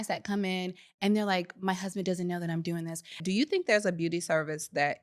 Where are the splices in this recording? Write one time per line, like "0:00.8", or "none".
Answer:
0:03.2